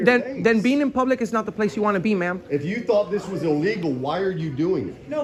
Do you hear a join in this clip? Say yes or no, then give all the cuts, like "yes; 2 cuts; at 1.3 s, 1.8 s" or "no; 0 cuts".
no; 0 cuts